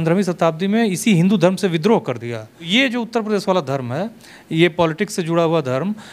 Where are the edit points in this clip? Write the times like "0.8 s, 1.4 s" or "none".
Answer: 2.7 s